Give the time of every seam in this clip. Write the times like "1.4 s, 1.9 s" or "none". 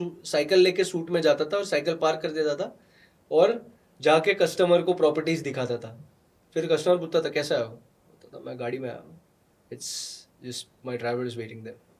none